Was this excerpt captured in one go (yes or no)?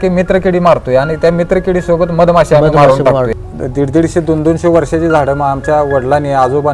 no